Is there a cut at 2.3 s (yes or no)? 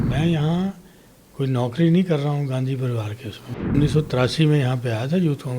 no